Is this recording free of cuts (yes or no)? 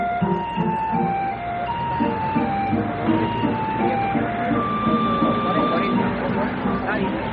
yes